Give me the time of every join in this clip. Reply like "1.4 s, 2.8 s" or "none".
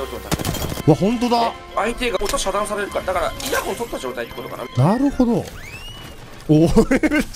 0.8 s, 2.2 s, 3.4 s, 4.7 s